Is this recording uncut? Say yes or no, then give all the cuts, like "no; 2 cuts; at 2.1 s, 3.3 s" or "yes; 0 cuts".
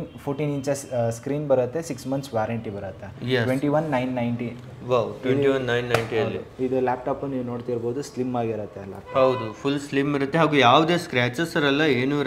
yes; 0 cuts